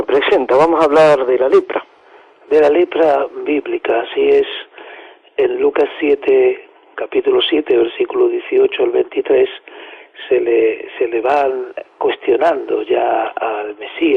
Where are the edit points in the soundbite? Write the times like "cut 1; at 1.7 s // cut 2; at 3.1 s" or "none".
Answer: cut 1; at 4.7 s